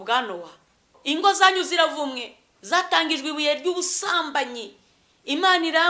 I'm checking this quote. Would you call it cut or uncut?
cut